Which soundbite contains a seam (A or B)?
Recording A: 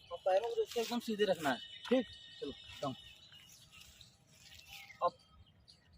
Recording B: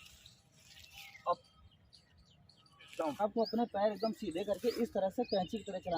B